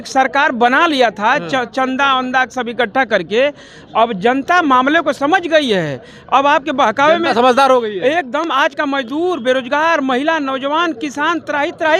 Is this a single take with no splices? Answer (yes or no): yes